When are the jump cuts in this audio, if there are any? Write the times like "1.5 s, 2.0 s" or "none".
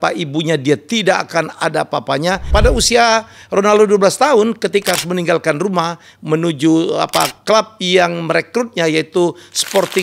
2.5 s